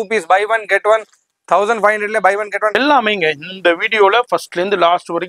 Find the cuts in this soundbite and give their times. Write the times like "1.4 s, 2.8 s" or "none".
2.8 s